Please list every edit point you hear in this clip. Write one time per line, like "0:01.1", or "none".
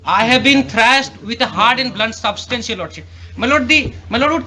none